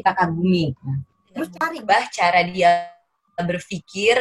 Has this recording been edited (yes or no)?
yes